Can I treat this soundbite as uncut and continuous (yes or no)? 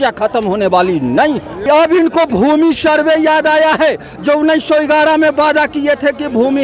no